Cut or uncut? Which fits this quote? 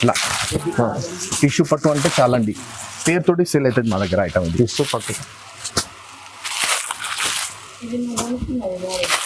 uncut